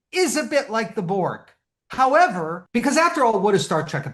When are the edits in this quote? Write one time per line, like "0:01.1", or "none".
0:02.6